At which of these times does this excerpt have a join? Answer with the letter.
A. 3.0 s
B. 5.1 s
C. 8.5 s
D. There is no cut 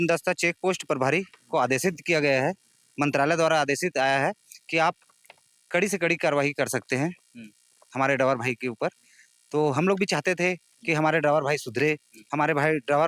D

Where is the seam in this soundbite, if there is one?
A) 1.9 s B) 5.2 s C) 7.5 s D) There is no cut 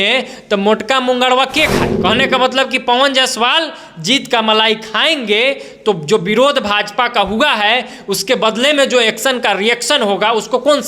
A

